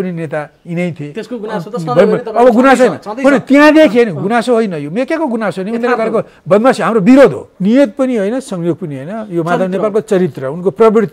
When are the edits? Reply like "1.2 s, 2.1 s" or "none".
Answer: 7.5 s